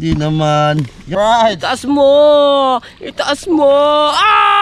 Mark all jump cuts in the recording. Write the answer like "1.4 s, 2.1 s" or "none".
1.1 s